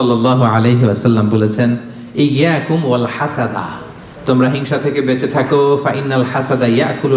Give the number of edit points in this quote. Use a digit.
0